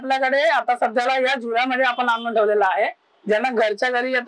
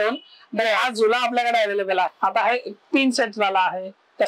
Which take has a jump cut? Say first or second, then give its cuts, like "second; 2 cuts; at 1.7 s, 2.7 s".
second; 1 cut; at 2.1 s